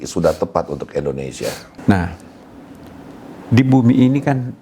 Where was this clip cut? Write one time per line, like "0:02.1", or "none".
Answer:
0:01.7